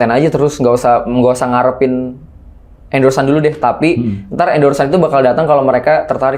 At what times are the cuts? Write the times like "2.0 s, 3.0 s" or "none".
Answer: none